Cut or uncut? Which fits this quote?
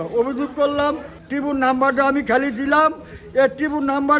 cut